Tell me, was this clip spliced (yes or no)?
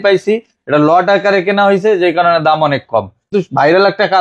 yes